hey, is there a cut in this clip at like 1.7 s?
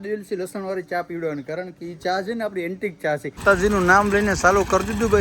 no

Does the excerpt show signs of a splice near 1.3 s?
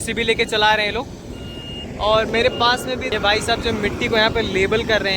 no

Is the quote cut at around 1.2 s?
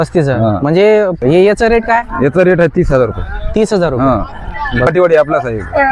yes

